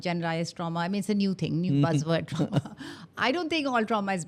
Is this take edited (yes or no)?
no